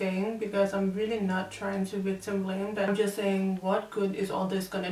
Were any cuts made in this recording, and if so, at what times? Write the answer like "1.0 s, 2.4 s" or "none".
2.9 s